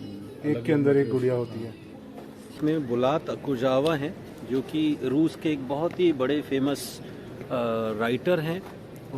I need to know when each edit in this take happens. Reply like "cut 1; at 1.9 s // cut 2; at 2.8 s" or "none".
cut 1; at 2.5 s